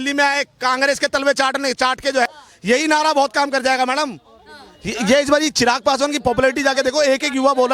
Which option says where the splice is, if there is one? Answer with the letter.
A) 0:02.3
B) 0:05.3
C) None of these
A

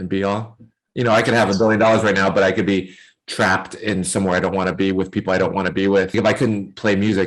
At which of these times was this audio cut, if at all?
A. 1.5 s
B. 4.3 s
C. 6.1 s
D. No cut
C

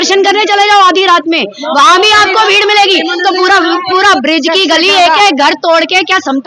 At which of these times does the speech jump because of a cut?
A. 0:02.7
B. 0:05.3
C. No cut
C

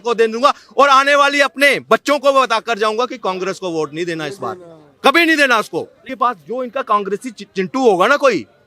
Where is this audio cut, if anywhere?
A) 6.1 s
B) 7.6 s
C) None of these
A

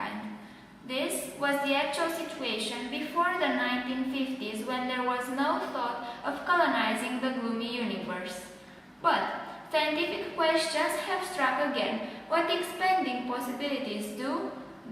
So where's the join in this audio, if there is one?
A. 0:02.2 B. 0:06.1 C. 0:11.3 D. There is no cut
A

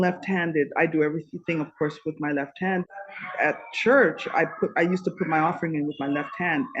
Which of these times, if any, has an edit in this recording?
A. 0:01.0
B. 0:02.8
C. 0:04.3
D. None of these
B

